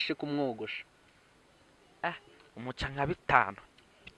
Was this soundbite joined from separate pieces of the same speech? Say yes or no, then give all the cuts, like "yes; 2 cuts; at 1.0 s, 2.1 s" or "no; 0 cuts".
no; 0 cuts